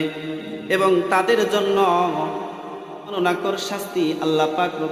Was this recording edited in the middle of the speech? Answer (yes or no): yes